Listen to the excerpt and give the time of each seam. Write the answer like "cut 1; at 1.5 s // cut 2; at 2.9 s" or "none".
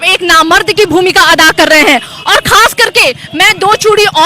none